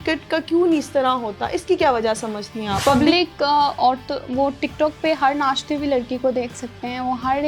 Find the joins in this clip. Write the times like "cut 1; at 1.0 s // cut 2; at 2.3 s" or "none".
cut 1; at 2.8 s